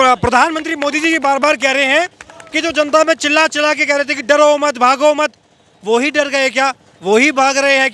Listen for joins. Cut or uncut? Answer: uncut